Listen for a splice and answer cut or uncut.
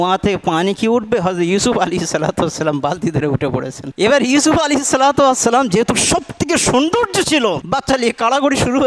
uncut